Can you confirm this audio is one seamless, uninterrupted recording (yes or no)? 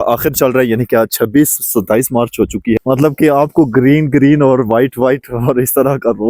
no